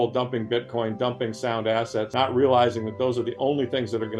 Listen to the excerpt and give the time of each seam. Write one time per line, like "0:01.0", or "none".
0:02.1

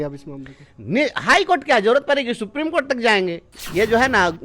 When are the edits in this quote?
0:03.5

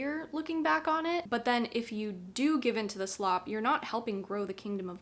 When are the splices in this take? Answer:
0:01.2

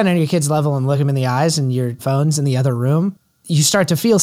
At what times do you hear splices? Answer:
0:01.0
0:02.0
0:03.3

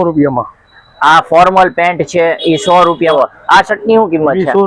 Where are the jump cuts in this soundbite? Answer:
0:03.1

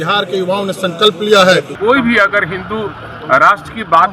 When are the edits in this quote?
0:01.7

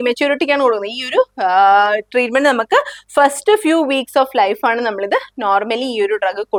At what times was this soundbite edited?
none

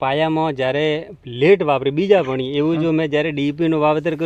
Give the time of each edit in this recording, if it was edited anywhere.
none

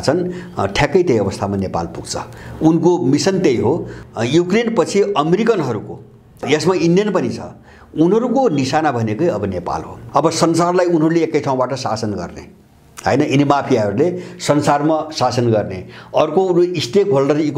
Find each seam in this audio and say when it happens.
0:03.9
0:06.4
0:10.0

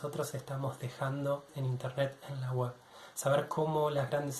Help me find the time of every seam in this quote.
0:01.5

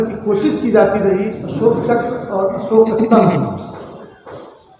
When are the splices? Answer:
0:01.4

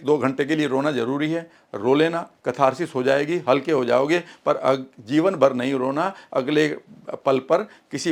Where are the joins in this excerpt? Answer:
none

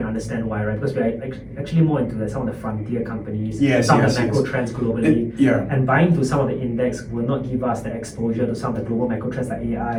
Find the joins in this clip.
none

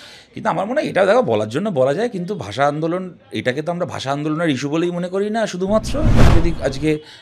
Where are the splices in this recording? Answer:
0:06.2

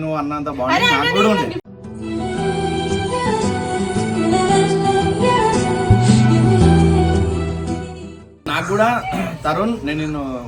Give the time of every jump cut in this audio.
0:08.4

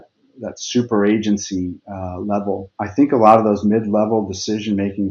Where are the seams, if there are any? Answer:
0:02.8

